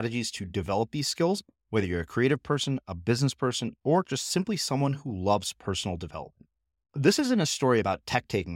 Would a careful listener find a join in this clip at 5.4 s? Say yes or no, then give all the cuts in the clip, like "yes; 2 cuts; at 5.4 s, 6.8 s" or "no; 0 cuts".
no; 0 cuts